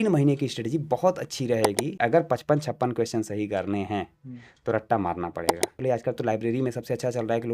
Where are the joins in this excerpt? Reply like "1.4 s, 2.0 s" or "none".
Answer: 1.9 s, 5.8 s